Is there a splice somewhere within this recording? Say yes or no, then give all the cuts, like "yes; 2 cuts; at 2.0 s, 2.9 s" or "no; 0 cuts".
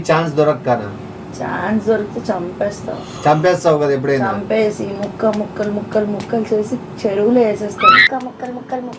no; 0 cuts